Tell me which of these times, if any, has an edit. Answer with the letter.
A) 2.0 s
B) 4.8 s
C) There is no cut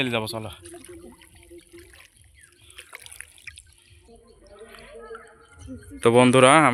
C